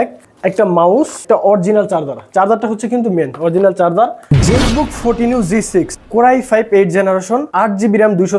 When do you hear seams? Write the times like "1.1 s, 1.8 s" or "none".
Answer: 4.2 s, 6.0 s, 7.5 s